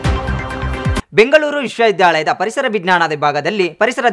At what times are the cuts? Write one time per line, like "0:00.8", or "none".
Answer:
0:01.0